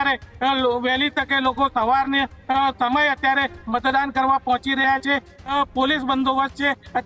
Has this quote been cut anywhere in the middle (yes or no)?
no